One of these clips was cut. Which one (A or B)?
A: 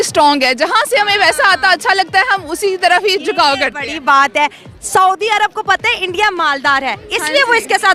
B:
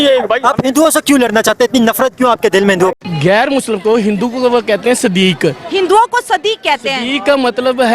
B